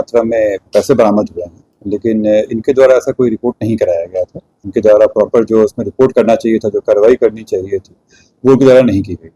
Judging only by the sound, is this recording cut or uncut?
cut